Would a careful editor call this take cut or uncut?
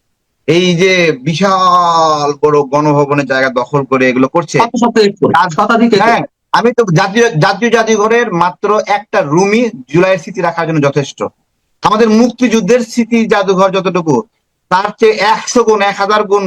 uncut